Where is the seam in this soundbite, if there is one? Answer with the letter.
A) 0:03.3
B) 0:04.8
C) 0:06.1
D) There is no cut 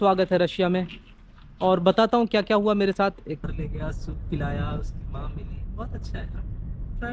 A